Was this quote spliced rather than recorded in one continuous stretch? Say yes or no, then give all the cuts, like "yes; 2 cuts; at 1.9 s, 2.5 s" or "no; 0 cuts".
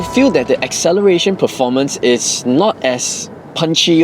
no; 0 cuts